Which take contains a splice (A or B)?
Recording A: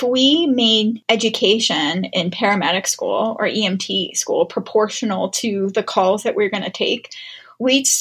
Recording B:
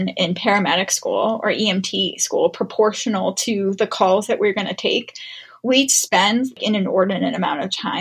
A